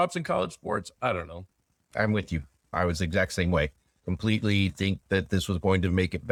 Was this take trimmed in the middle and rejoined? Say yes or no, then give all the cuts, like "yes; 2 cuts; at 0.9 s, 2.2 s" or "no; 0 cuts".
no; 0 cuts